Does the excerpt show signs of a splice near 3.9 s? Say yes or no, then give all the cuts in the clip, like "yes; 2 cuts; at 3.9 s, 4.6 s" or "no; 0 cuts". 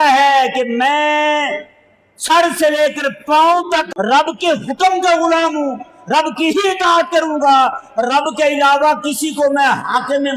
yes; 1 cut; at 3.9 s